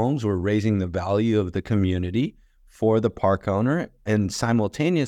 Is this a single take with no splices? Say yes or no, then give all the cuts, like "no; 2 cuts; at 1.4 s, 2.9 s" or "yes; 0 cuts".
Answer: yes; 0 cuts